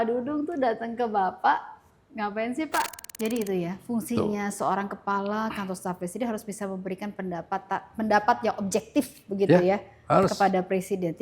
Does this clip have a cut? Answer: yes; 1 cut; at 3.0 s

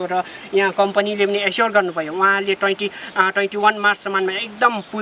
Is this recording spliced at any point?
no; 0 cuts

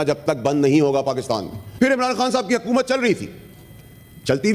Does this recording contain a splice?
yes; 1 cut; at 1.6 s

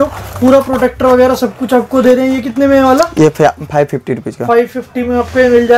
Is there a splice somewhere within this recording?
no; 0 cuts

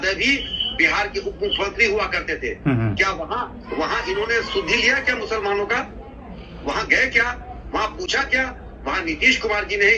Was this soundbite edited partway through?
no; 0 cuts

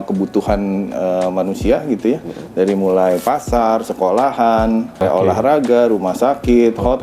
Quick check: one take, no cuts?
no; 1 cut; at 5.0 s

